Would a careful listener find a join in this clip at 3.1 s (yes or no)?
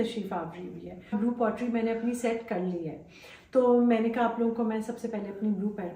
no